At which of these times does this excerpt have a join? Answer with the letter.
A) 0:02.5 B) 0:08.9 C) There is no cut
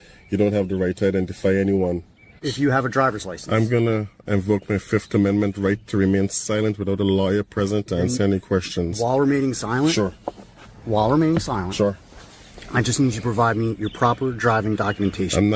A